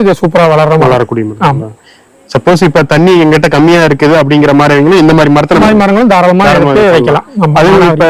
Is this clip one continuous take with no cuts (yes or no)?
yes